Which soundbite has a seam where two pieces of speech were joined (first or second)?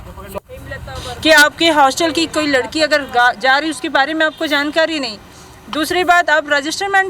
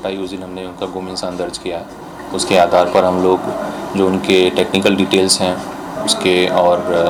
first